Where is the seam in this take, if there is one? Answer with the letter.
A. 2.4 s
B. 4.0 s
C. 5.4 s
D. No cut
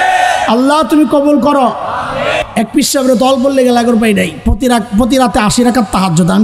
A